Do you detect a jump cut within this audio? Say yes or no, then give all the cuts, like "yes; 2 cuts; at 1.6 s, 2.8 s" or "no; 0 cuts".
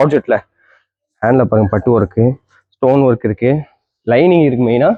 no; 0 cuts